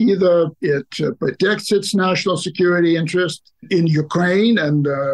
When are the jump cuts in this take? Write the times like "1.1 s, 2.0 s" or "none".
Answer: 3.6 s

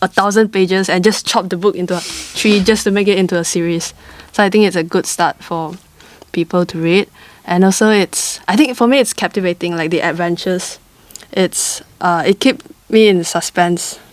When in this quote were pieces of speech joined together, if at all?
none

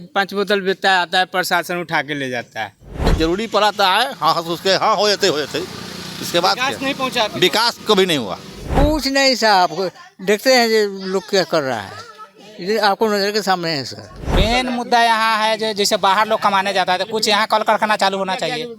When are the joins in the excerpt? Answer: 3.1 s, 8.8 s, 14.3 s

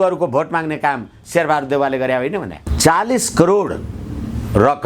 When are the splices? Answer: 2.6 s

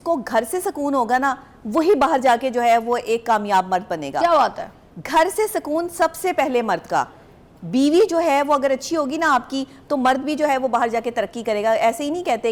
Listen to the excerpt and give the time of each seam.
none

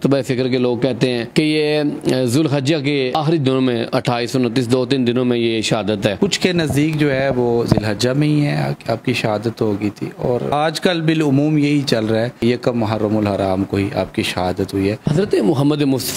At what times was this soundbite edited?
6.2 s, 15.0 s

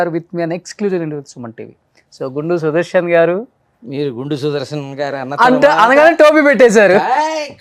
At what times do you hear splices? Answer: none

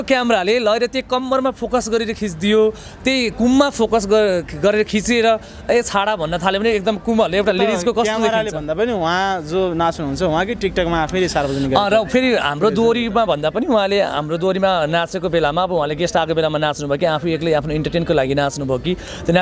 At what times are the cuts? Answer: none

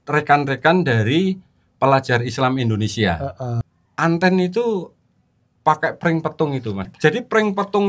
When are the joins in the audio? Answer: 3.6 s, 6.9 s

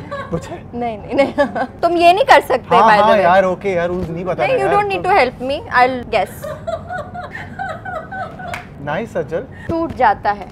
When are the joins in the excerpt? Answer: 1.7 s, 6.0 s, 7.3 s, 8.7 s, 9.5 s

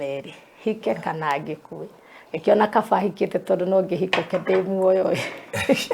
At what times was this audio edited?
none

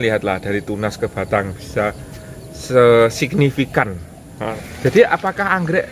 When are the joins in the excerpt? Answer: 4.4 s

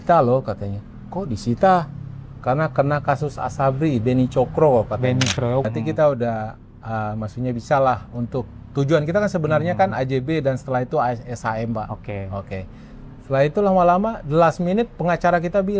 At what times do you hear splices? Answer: 5.7 s

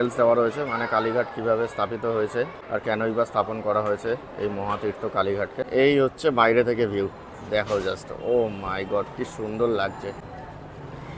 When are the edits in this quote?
2.6 s, 5.6 s, 10.2 s

